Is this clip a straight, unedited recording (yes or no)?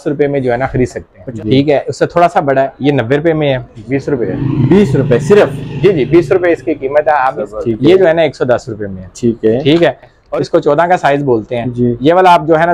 no